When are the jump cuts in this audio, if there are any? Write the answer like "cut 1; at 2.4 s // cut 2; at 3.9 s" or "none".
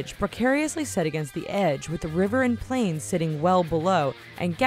cut 1; at 3.2 s

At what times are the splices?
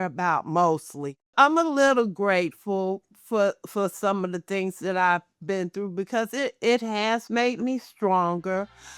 cut 1; at 1.3 s

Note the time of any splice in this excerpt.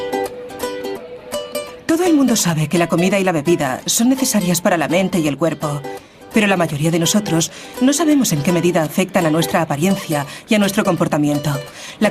cut 1; at 3.2 s

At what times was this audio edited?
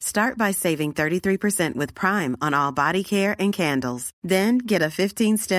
none

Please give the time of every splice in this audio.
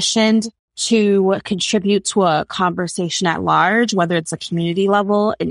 none

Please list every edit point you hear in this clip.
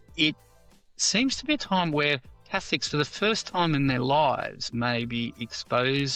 none

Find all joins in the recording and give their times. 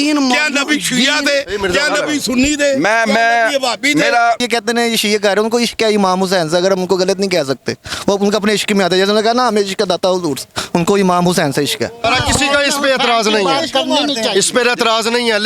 cut 1; at 4.4 s // cut 2; at 12.0 s

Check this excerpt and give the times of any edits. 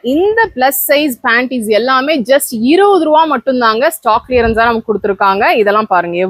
none

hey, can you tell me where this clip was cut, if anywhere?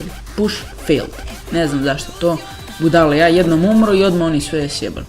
none

